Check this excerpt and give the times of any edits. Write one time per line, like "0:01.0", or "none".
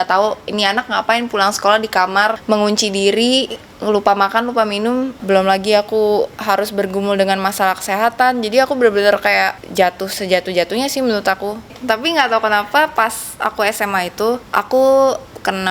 0:02.4
0:05.1
0:09.6
0:11.7
0:14.4